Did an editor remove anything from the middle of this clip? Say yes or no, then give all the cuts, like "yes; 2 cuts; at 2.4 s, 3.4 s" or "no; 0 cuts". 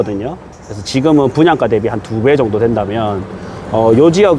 no; 0 cuts